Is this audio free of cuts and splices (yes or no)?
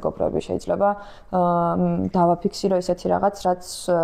yes